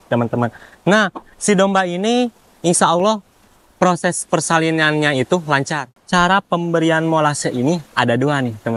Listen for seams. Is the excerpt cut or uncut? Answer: cut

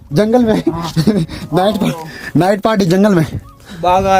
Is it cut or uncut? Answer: uncut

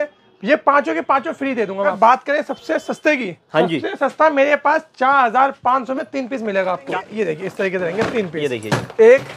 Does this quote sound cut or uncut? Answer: cut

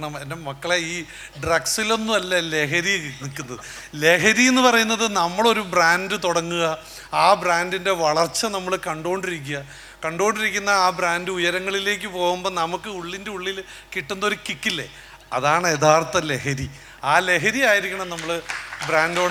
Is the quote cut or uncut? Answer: uncut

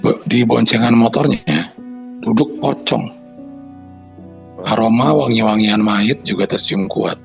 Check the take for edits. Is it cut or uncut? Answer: uncut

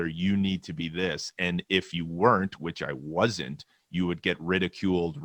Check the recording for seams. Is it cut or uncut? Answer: uncut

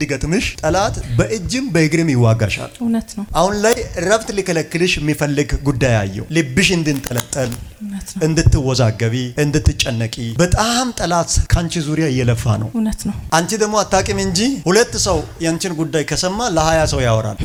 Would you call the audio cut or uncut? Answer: uncut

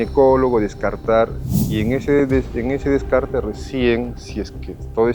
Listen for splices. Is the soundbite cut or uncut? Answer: cut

